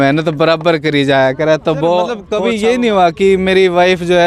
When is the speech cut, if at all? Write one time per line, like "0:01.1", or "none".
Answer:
0:02.3